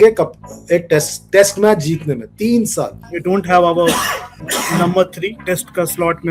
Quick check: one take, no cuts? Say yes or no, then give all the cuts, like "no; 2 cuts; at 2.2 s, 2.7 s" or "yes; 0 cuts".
no; 3 cuts; at 3.0 s, 4.3 s, 5.4 s